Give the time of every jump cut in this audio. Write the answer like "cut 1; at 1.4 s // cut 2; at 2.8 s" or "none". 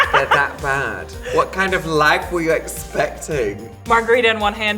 cut 1; at 1.2 s // cut 2; at 3.7 s